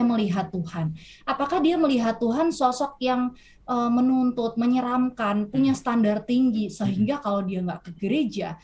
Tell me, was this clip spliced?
no; 0 cuts

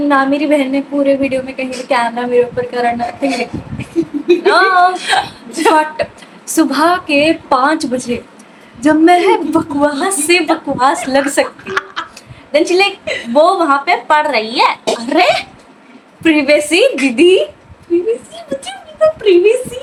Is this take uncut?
yes; 0 cuts

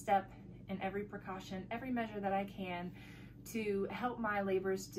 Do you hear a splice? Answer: no; 0 cuts

